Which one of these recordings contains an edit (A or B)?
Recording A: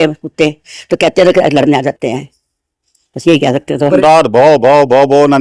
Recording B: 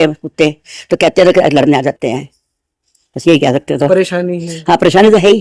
A